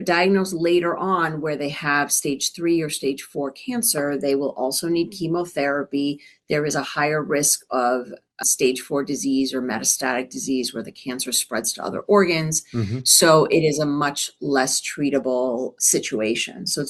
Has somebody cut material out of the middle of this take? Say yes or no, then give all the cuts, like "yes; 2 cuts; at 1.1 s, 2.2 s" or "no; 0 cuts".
no; 0 cuts